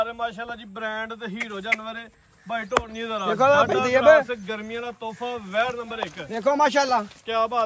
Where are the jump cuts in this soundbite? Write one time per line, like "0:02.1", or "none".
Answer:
none